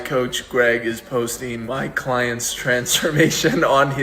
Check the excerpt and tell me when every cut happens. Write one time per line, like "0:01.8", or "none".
0:01.6